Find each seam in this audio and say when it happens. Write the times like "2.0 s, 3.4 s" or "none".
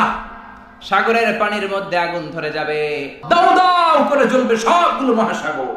3.2 s